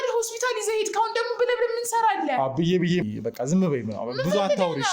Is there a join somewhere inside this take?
yes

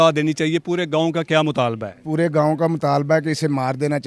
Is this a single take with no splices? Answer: yes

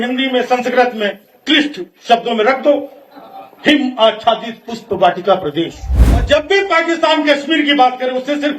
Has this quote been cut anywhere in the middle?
yes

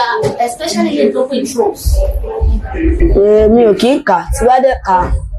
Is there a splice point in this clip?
no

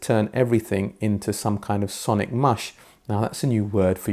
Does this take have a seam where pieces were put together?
no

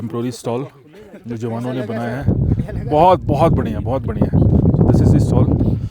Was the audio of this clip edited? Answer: no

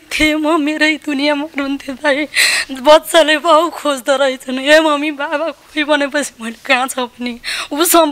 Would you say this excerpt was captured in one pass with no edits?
yes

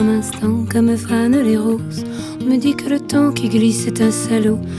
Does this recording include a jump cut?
no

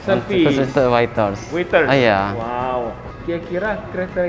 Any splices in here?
yes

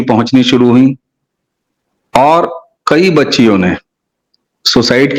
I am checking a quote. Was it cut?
no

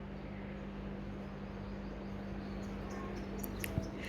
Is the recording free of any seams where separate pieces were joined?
yes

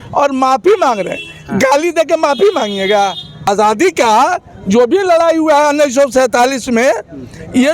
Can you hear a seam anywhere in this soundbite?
yes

